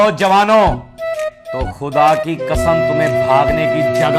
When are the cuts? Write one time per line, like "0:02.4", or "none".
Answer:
none